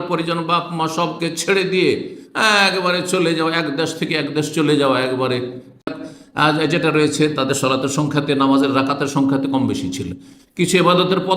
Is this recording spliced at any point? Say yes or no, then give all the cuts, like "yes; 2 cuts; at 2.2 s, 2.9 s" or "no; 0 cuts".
yes; 1 cut; at 5.9 s